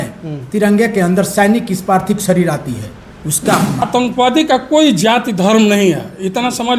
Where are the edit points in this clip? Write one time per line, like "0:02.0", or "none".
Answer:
0:03.8

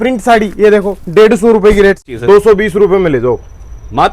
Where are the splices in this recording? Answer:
0:02.1

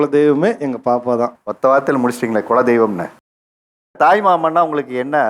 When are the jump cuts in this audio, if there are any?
0:03.9

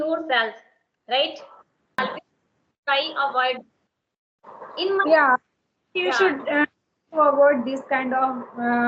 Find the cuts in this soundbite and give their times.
0:02.0

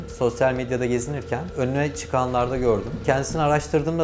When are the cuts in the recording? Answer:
0:01.5

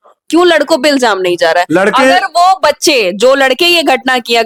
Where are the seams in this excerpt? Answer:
none

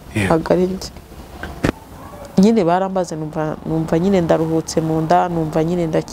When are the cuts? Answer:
0:01.7

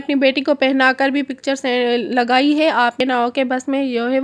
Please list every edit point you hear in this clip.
0:03.0

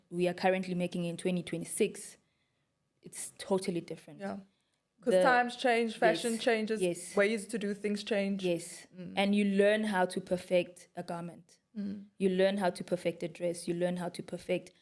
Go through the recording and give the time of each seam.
none

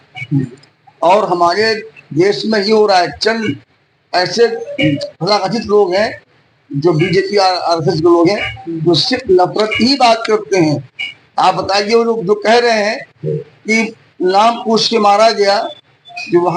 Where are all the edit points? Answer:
none

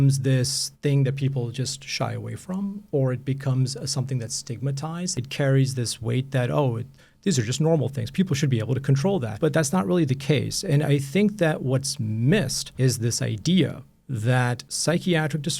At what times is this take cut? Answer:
0:05.1
0:09.3
0:12.6
0:14.7

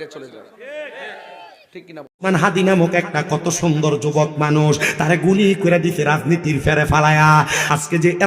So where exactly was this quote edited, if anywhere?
0:02.1

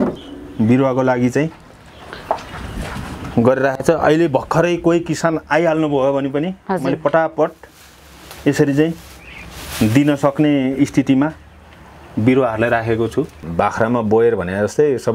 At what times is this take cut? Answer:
0:13.4

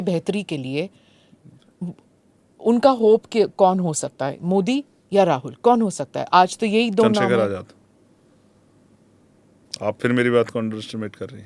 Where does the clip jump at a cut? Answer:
none

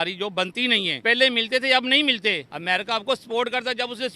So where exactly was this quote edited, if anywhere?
0:00.9
0:02.5

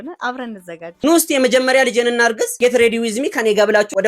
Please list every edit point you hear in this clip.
0:00.9

